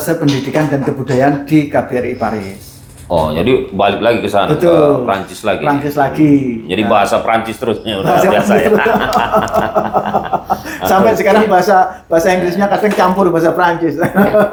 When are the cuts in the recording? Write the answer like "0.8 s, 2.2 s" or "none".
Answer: none